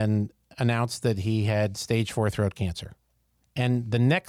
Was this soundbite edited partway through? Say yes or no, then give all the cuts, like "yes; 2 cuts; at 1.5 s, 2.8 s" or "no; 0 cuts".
no; 0 cuts